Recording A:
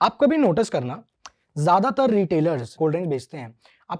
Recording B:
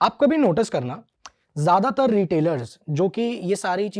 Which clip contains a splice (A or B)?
A